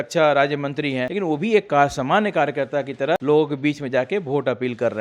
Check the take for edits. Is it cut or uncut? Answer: cut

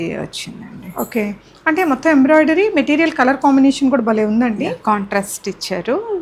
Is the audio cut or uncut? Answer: uncut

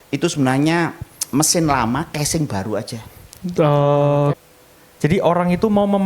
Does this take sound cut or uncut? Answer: cut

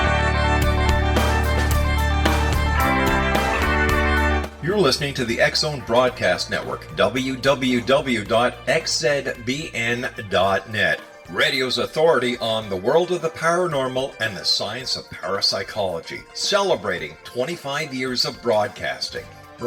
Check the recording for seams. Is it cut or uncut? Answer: uncut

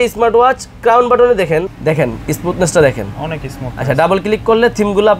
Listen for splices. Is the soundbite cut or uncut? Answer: cut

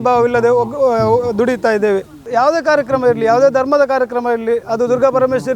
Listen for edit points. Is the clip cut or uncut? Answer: cut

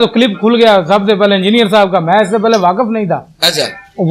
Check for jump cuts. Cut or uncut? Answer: uncut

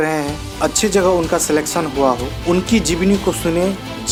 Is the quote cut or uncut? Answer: uncut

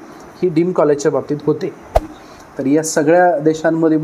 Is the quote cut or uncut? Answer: cut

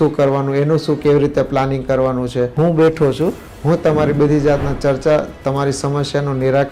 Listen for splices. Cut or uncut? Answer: cut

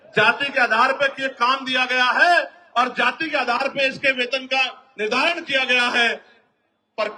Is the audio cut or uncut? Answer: uncut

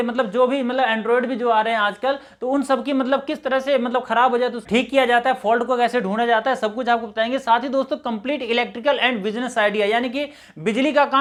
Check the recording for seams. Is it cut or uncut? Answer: uncut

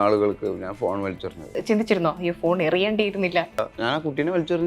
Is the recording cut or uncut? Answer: cut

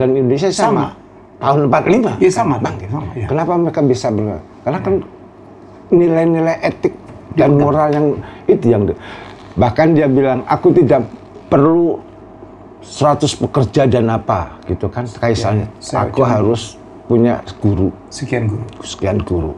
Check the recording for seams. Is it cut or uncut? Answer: uncut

